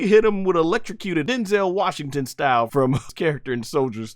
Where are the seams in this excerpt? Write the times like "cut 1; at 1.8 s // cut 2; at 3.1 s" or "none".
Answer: cut 1; at 1.2 s // cut 2; at 2.9 s